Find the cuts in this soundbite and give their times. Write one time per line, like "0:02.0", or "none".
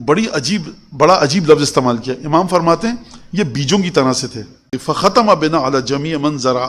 0:04.7

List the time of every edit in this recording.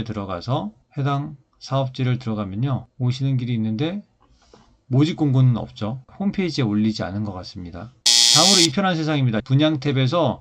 0:02.9
0:09.4

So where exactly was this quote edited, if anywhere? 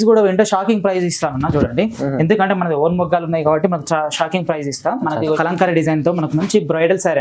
0:05.4

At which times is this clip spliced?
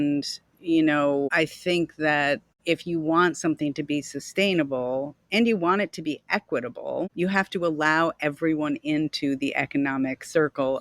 0:01.3
0:02.5
0:07.1

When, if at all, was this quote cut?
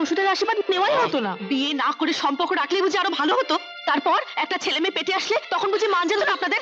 0:01.4

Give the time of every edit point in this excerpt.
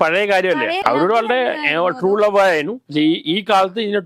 0:00.8
0:02.8

